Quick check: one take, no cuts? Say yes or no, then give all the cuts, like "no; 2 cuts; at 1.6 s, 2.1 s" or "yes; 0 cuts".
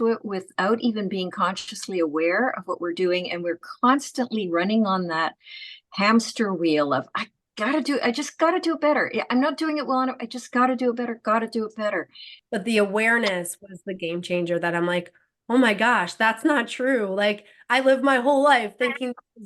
no; 1 cut; at 12.4 s